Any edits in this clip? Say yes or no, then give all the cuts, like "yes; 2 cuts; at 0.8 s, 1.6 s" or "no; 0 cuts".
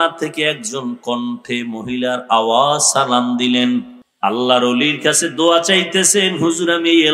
yes; 1 cut; at 4.0 s